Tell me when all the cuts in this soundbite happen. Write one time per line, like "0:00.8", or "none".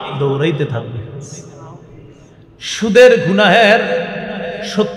0:02.4